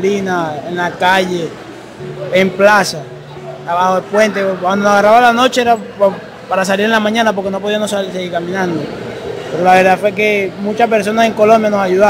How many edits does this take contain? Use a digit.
0